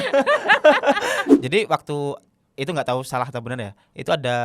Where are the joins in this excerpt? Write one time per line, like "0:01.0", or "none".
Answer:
0:01.3